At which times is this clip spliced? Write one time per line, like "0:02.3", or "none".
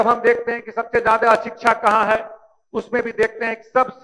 none